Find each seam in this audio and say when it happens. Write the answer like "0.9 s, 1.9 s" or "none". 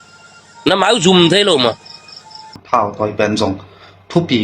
2.6 s